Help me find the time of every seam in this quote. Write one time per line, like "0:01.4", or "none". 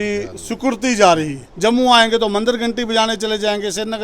0:01.4

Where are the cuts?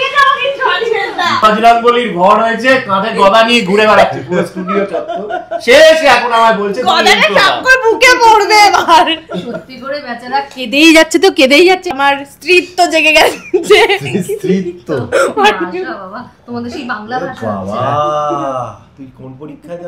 0:01.4
0:12.0

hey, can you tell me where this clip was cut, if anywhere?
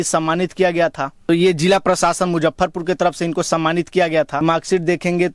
0:01.2
0:04.4

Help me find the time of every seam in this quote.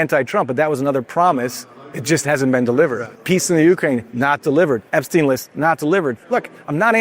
0:03.1

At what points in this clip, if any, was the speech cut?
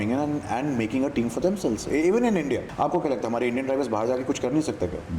0:02.7

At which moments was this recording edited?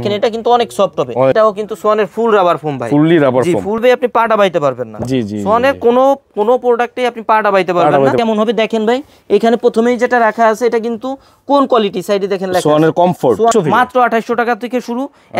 0:01.3
0:03.8
0:08.2
0:13.5

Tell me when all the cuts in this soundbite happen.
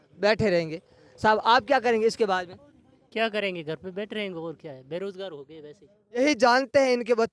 0:06.2

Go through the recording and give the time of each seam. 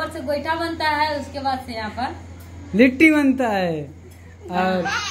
none

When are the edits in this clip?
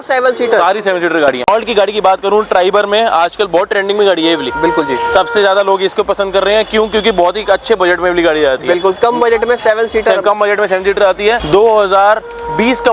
none

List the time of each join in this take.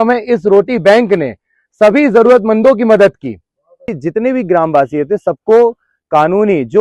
0:04.0

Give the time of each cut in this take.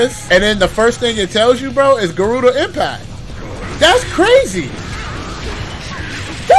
none

